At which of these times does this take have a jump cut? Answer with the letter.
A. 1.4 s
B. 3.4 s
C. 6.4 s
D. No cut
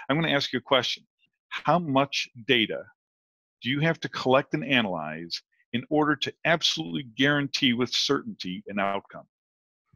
A